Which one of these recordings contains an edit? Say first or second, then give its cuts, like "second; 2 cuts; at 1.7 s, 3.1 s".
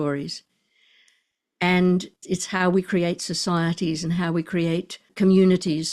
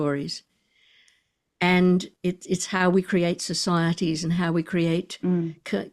first; 2 cuts; at 2.2 s, 5.0 s